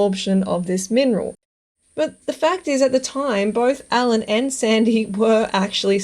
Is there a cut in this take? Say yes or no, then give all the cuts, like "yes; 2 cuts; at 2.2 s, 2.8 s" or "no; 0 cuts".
yes; 1 cut; at 1.4 s